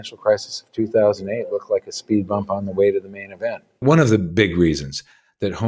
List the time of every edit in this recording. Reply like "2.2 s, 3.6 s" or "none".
3.8 s